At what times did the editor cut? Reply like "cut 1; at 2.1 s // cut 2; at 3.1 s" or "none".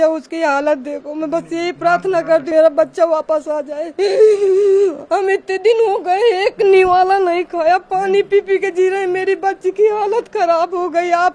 cut 1; at 2.5 s